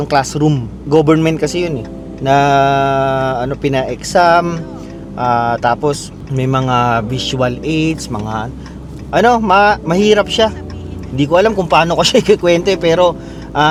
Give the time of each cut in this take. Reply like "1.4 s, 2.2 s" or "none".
none